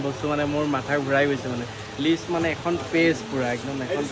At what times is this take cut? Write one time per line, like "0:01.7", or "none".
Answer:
none